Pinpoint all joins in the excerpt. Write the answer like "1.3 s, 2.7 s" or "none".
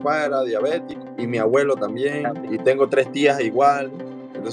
0.9 s, 2.4 s